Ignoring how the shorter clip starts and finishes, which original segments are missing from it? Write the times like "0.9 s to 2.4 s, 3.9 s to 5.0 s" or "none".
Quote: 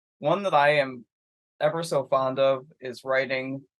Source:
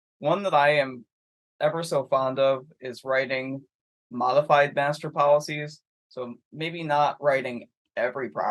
none